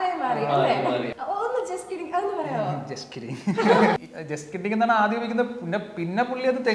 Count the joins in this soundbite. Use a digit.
2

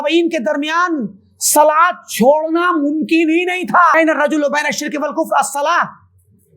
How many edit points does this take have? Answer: 1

